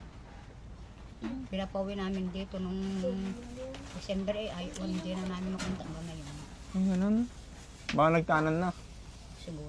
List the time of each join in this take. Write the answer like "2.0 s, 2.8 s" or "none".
none